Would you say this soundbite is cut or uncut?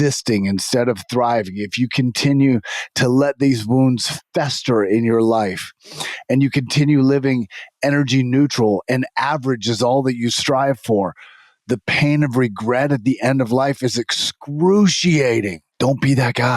cut